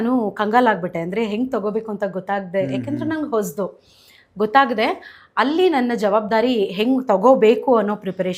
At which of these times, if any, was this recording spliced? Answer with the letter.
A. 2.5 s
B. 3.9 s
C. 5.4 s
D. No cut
D